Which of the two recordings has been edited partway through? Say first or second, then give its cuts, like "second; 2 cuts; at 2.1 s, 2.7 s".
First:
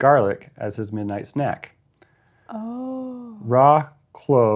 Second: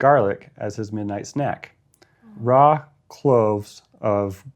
second; 1 cut; at 2.3 s